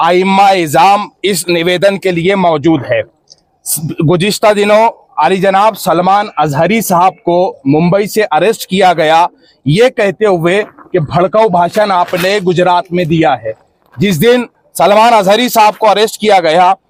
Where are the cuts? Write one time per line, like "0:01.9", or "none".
none